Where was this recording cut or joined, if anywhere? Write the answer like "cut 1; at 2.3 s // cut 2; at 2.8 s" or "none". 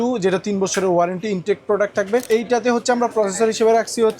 cut 1; at 2.3 s